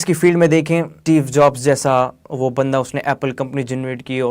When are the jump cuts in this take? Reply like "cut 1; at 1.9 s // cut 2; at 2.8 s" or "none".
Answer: cut 1; at 0.9 s